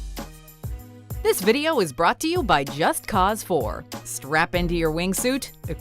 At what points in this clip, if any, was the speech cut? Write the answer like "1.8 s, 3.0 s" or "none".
1.0 s